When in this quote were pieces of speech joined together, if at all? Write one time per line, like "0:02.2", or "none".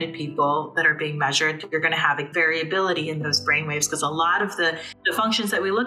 0:02.2
0:04.9